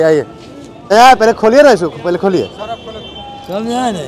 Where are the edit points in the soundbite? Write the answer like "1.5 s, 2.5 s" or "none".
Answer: 0.9 s